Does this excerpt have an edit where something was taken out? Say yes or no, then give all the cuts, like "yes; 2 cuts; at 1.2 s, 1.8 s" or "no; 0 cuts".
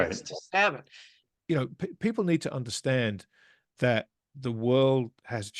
yes; 1 cut; at 1.3 s